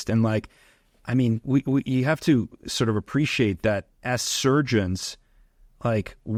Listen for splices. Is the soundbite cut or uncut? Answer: uncut